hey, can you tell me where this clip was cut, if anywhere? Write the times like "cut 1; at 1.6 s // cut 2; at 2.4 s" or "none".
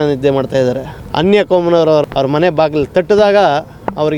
cut 1; at 0.9 s // cut 2; at 2.1 s